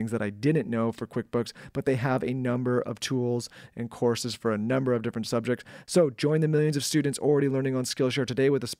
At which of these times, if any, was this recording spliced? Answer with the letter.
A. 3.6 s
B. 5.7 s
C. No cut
B